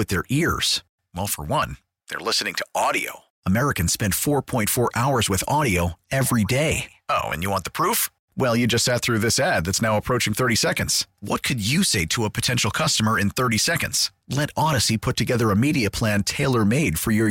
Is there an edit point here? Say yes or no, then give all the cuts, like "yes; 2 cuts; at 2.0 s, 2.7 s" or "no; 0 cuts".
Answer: no; 0 cuts